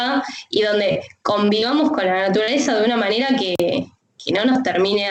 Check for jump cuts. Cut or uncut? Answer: cut